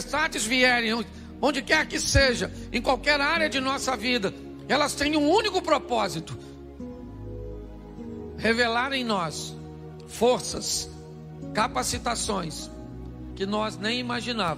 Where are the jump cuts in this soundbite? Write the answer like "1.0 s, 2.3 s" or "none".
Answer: 6.2 s, 7.7 s